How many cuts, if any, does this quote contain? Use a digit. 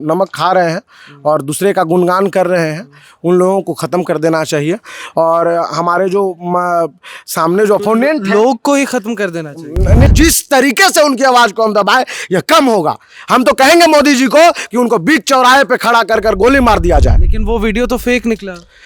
1